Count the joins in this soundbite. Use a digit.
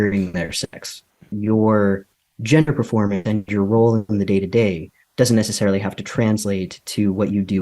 1